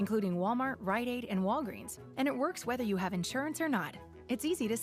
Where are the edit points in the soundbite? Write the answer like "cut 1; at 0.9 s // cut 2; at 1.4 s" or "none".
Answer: none